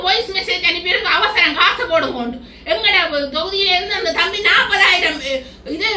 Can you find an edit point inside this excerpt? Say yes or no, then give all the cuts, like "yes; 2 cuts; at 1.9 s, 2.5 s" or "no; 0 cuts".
no; 0 cuts